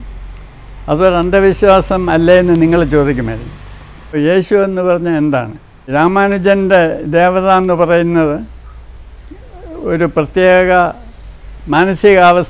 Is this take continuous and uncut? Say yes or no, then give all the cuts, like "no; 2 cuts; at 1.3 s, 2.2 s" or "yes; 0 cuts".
no; 2 cuts; at 4.1 s, 5.9 s